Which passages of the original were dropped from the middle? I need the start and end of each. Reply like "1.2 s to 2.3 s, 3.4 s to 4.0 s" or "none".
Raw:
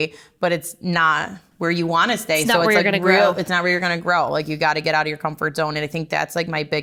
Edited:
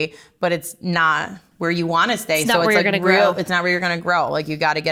none